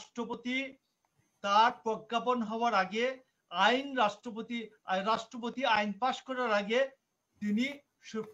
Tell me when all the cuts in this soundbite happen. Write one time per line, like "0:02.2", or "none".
none